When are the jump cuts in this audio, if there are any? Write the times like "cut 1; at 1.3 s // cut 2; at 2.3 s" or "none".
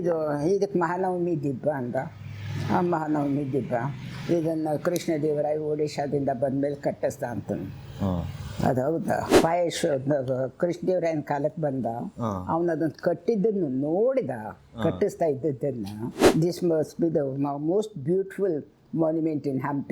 cut 1; at 9.3 s // cut 2; at 16.1 s